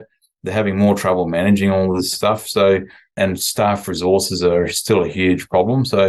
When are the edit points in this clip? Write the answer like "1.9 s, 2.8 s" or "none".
2.1 s, 3.1 s